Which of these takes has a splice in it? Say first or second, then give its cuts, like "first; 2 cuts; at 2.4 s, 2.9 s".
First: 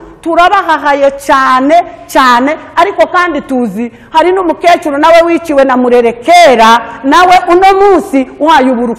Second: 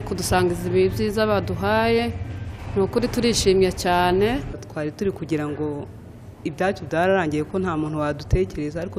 second; 1 cut; at 4.6 s